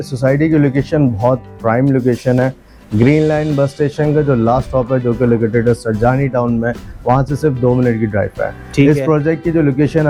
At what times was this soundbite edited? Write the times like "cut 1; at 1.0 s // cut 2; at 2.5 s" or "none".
none